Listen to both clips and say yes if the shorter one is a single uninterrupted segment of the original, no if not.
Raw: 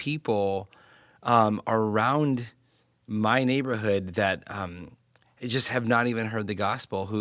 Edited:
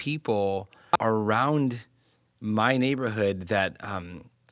no